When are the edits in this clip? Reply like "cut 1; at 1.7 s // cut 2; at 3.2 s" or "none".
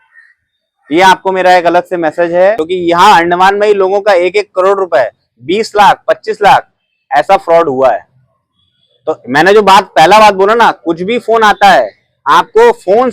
cut 1; at 2.6 s